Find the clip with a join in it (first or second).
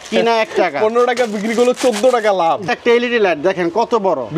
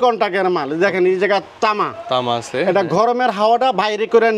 first